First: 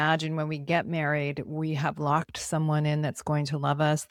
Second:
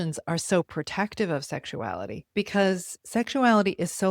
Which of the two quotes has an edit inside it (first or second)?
second